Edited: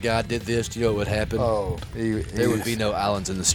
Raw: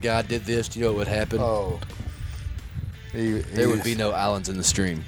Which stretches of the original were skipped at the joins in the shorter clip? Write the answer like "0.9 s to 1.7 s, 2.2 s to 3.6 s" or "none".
1.8 s to 3.0 s